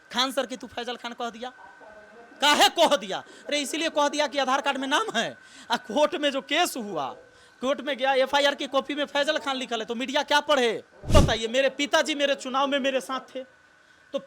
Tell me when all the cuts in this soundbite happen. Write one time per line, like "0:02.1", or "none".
0:11.1